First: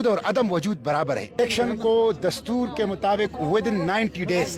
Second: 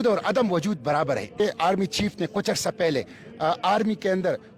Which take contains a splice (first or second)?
second